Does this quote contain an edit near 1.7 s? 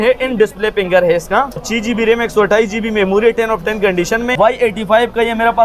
yes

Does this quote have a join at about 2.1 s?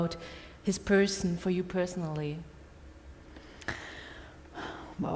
no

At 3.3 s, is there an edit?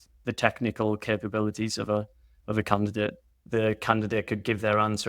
yes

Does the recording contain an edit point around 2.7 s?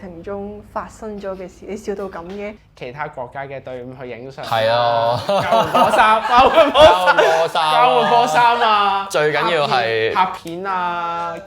yes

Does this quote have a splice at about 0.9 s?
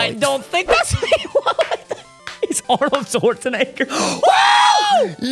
no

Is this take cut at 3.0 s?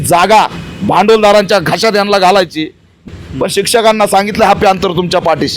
yes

